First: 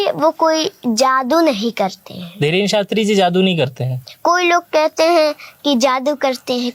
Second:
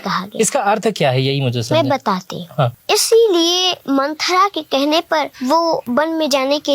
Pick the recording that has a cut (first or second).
second